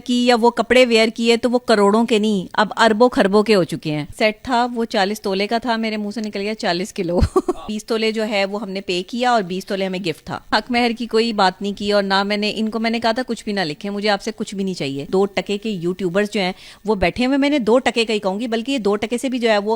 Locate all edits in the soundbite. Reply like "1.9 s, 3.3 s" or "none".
4.0 s, 7.6 s, 10.5 s, 15.0 s

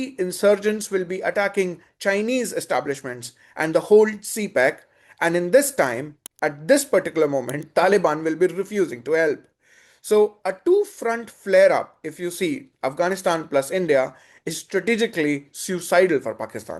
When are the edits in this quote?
none

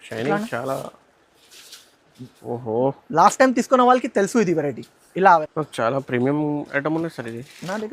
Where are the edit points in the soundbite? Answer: 5.5 s

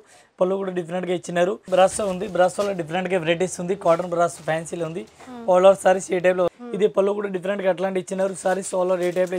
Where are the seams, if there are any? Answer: 1.6 s, 6.6 s

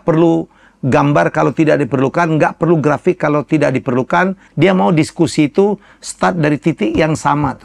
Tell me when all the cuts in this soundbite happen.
4.4 s

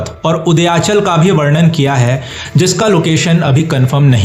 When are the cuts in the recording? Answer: none

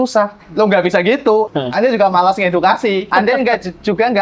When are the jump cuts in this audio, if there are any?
1.5 s, 3.1 s

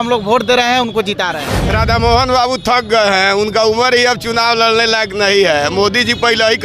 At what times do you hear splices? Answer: 1.6 s

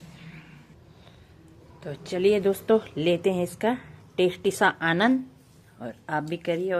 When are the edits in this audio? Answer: none

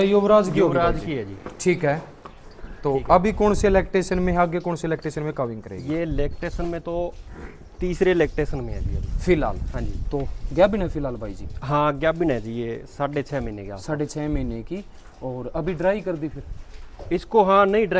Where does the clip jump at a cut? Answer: none

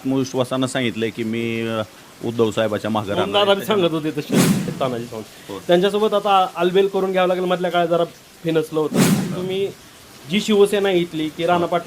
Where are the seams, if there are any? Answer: 4.7 s, 9.2 s

